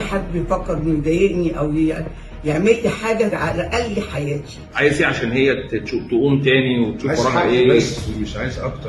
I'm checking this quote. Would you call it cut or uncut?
uncut